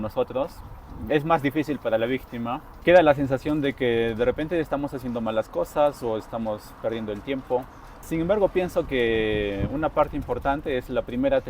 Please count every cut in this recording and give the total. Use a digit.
1